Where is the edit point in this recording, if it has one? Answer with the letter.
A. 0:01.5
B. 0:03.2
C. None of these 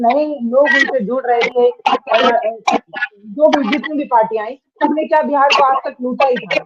A